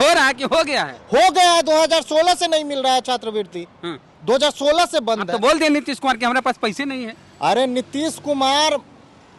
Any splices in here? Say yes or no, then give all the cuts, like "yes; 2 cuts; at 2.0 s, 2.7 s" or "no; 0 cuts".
no; 0 cuts